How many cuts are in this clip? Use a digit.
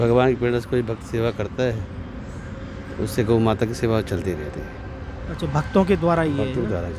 0